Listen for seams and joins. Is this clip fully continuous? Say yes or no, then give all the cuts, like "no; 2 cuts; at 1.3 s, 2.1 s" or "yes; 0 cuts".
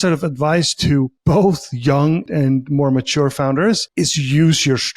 no; 3 cuts; at 1.1 s, 2.3 s, 3.9 s